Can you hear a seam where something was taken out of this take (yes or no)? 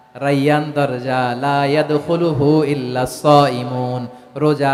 no